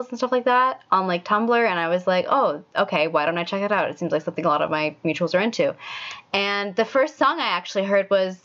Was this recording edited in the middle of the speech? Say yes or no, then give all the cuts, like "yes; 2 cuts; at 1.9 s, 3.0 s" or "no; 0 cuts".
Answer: no; 0 cuts